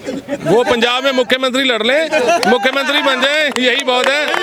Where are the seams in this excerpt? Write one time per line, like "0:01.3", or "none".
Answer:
none

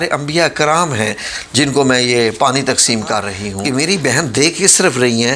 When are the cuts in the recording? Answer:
0:03.6

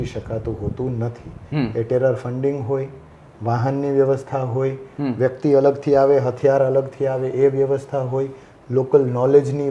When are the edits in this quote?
none

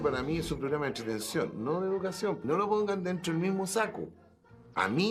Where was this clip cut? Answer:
0:02.4

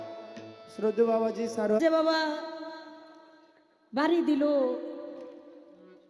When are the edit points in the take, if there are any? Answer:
0:01.8

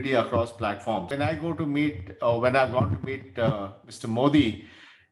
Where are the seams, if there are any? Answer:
0:01.1

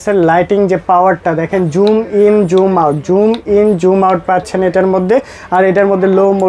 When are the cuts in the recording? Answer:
none

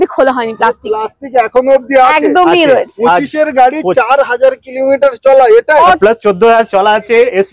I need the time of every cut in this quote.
0:06.0

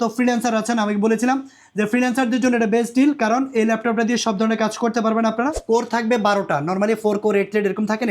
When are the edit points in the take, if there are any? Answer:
0:05.6

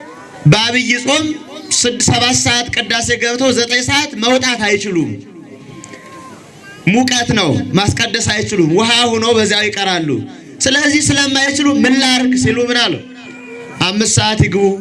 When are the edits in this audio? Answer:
none

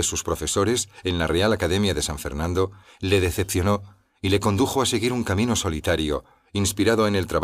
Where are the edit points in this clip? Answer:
0:04.9

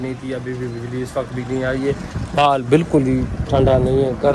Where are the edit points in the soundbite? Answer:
none

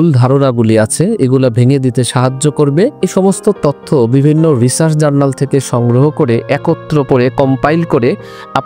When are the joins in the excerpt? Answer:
0:03.0

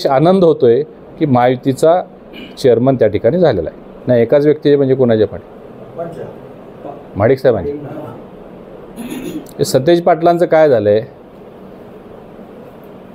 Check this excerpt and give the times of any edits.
0:03.9

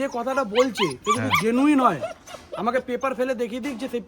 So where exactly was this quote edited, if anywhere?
none

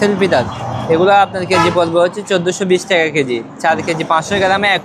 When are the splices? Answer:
none

